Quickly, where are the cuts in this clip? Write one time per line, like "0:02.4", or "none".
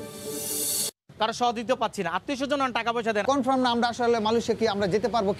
0:00.8
0:03.2